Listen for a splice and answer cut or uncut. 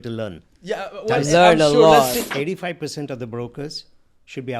cut